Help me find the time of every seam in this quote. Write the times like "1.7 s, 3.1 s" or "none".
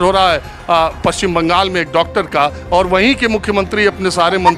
none